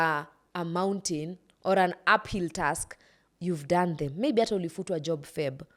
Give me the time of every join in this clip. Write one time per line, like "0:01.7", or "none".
none